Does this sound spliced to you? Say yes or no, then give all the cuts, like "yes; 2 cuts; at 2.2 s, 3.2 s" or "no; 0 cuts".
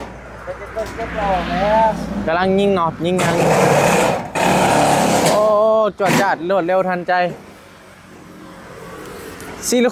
no; 0 cuts